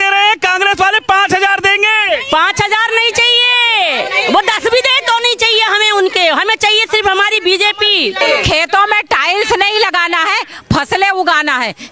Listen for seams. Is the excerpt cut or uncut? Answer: cut